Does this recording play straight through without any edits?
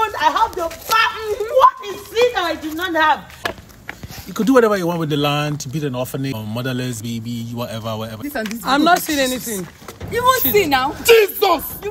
no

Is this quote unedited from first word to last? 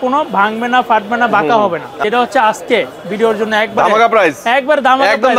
no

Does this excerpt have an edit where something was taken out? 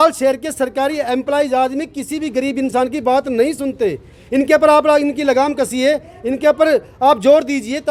no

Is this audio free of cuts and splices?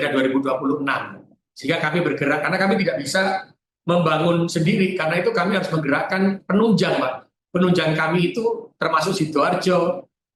yes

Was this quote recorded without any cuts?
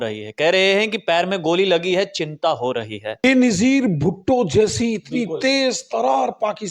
no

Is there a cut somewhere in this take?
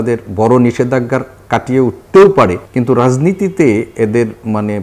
yes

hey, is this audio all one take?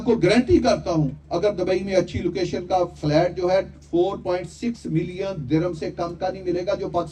yes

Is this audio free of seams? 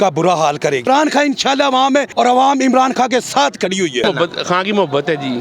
no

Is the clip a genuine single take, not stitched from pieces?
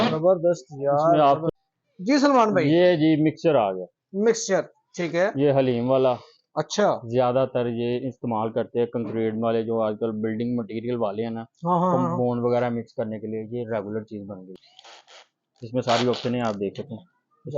no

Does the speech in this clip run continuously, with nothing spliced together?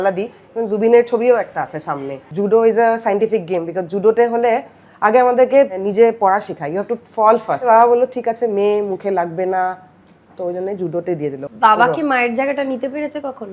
no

